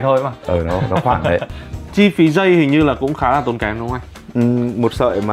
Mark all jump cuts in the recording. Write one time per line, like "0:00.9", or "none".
0:01.6